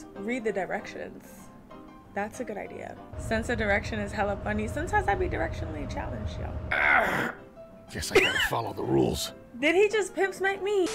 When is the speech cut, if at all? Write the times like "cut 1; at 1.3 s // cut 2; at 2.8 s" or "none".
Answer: cut 1; at 3.1 s // cut 2; at 6.6 s